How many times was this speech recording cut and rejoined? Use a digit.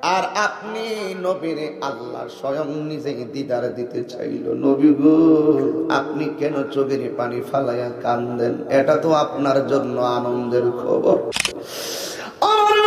1